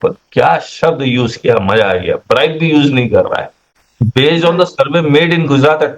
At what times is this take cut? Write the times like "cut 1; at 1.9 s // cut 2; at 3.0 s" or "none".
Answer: cut 1; at 3.8 s